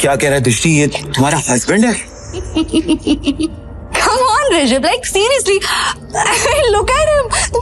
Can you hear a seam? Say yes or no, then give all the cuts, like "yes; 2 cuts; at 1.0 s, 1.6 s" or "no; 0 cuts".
yes; 1 cut; at 2.5 s